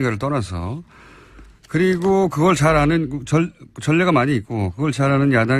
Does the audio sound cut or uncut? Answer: cut